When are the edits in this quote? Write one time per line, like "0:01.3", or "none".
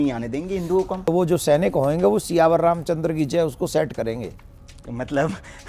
0:01.0